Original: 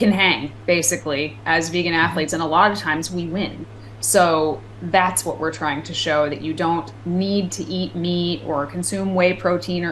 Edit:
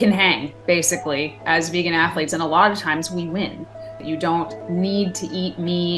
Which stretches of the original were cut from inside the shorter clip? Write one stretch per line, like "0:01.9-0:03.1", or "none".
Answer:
0:04.0-0:06.4